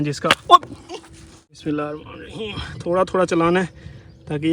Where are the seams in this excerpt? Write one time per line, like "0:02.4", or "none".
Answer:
0:01.6